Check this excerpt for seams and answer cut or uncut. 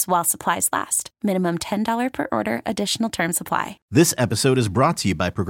cut